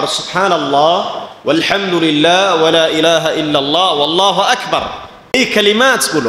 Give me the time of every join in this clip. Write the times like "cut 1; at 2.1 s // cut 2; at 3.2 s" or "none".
cut 1; at 5.3 s